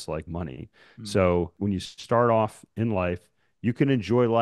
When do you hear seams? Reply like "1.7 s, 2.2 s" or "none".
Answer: 1.5 s